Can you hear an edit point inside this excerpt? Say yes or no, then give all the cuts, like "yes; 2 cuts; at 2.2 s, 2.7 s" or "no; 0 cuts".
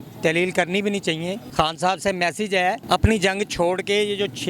yes; 2 cuts; at 1.4 s, 2.8 s